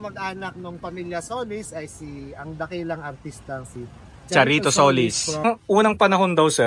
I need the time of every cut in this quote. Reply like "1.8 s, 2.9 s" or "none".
5.4 s